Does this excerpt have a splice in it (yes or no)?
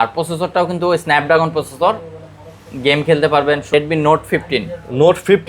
yes